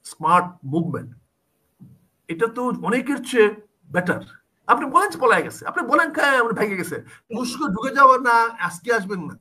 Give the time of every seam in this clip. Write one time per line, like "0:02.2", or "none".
0:07.3